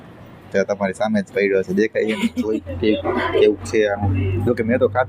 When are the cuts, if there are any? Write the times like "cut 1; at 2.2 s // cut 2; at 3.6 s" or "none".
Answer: cut 1; at 2.4 s